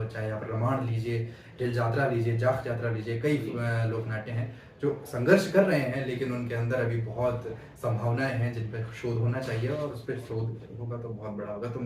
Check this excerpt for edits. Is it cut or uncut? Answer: uncut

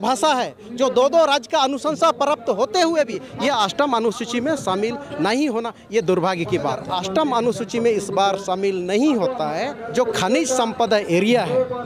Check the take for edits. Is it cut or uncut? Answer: cut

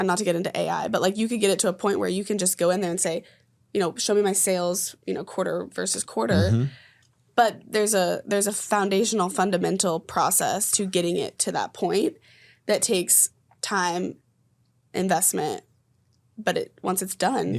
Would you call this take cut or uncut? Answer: uncut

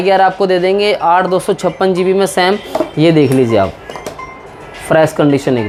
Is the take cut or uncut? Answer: uncut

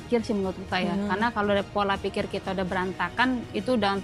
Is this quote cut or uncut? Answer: uncut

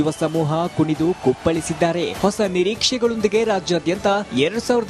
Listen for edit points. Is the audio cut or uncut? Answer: uncut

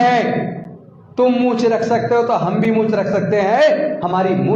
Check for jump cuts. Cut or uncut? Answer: uncut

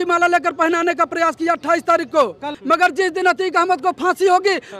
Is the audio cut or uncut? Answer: cut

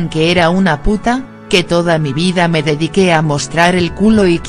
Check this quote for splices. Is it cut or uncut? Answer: cut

